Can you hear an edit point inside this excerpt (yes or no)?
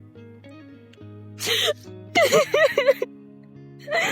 yes